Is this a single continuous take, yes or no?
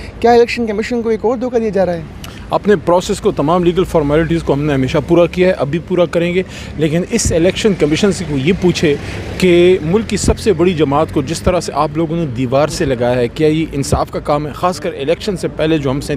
yes